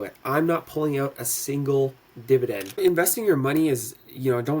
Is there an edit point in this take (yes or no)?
yes